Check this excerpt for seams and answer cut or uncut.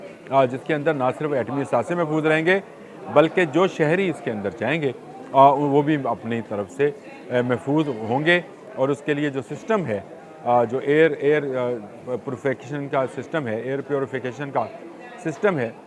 uncut